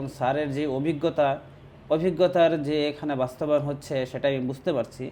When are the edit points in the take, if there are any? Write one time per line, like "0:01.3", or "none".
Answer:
none